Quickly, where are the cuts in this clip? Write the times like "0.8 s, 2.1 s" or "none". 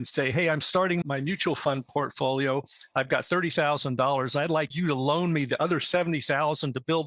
1.0 s, 4.7 s